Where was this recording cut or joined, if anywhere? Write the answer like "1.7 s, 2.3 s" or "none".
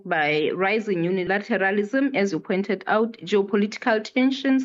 none